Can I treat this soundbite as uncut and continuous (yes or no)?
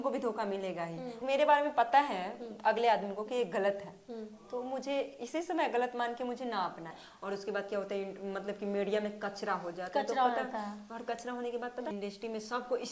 no